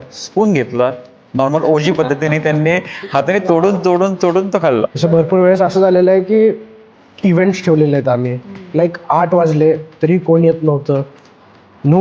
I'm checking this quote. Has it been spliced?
yes; 2 cuts; at 4.9 s, 8.7 s

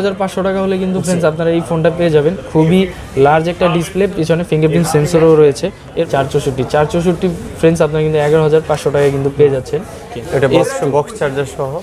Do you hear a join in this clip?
yes; 2 cuts; at 6.1 s, 10.2 s

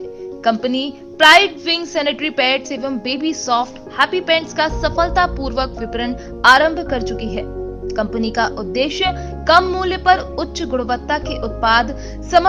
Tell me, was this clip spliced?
no; 0 cuts

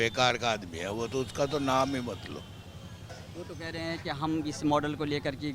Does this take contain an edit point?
no; 0 cuts

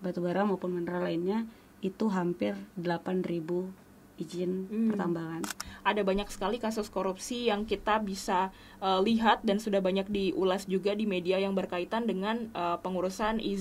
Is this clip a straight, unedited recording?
no; 1 cut; at 5.7 s

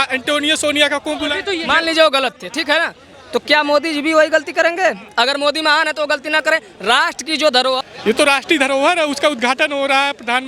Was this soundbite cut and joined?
yes; 2 cuts; at 1.4 s, 7.9 s

